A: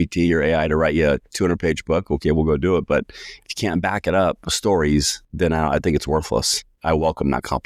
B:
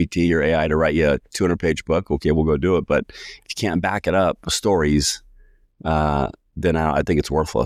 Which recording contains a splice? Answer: A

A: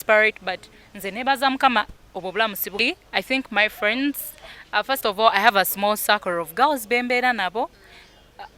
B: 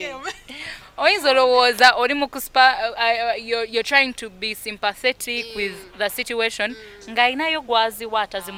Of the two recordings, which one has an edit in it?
A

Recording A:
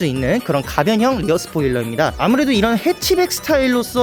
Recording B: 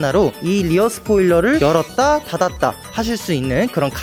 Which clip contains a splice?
A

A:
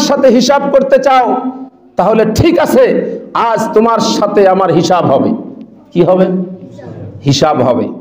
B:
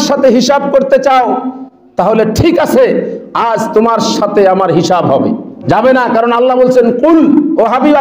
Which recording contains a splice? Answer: B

